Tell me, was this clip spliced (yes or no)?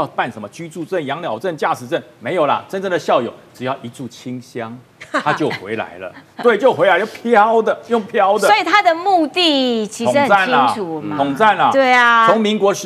no